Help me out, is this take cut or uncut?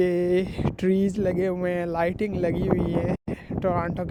uncut